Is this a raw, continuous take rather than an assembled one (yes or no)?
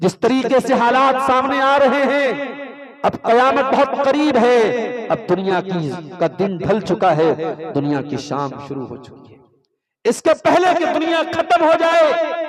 yes